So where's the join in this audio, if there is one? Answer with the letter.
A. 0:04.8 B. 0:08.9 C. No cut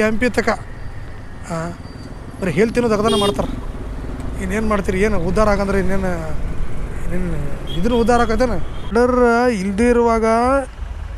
B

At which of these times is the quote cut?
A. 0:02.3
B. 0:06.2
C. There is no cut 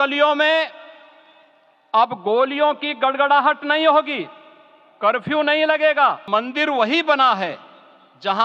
B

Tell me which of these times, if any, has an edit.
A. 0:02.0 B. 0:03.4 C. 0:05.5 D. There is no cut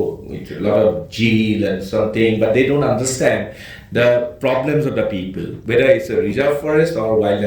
C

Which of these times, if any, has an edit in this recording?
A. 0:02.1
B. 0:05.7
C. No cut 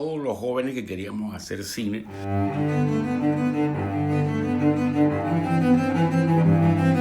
A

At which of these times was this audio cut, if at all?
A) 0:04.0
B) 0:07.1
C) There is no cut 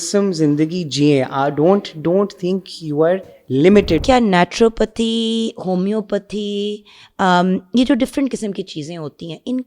A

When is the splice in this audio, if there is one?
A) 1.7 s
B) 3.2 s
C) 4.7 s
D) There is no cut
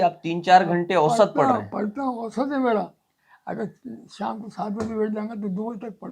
B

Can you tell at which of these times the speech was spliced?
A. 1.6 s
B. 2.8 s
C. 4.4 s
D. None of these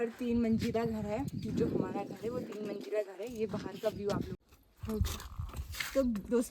C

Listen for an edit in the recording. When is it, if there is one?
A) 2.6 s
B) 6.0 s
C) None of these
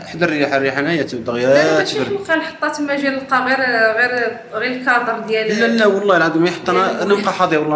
C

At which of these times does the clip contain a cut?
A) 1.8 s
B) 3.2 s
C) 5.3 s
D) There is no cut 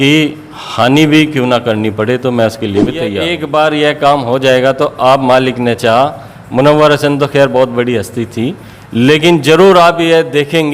B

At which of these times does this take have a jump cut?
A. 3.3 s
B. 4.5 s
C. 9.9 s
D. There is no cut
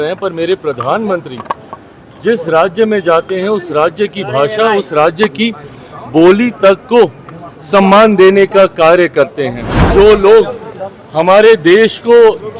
C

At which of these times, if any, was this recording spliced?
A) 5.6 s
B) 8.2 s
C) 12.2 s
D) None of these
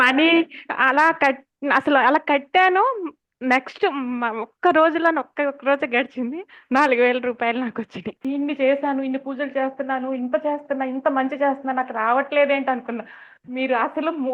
B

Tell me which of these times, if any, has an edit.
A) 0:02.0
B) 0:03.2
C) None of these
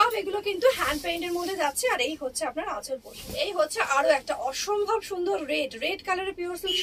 B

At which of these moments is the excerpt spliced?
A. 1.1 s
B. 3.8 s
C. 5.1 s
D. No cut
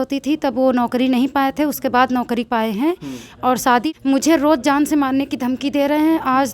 B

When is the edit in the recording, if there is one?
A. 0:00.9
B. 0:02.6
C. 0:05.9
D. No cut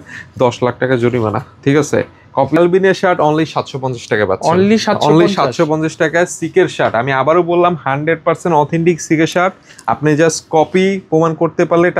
B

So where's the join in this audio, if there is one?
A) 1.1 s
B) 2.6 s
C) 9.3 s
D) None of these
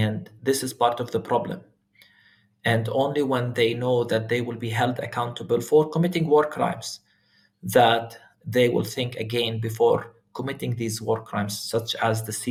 D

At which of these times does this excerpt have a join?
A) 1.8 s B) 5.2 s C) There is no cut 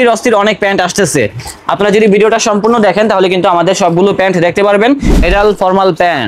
B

